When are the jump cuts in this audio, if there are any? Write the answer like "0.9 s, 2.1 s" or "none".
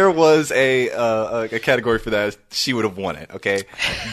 none

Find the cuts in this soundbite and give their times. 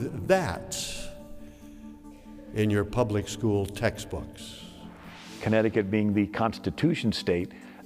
5.3 s

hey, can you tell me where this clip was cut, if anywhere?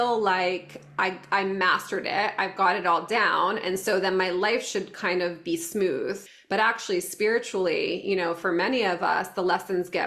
6.3 s

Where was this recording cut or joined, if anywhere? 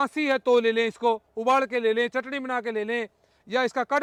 none

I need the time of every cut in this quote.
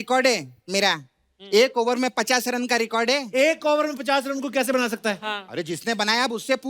none

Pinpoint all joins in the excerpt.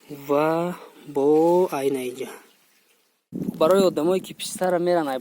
3.3 s

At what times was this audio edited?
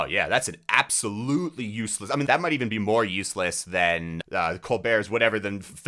none

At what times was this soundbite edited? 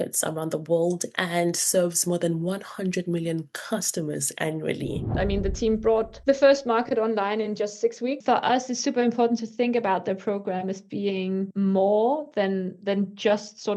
5.1 s, 6.1 s, 8.2 s, 11.5 s

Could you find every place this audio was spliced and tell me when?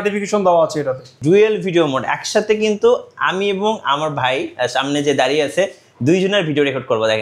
1.1 s

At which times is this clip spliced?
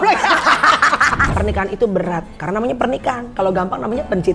1.2 s

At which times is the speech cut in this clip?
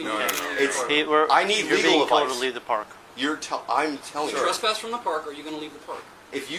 none

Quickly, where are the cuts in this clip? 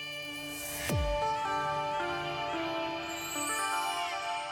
none

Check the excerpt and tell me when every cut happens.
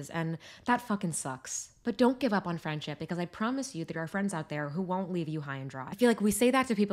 none

